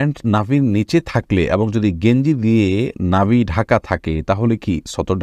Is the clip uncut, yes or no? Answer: yes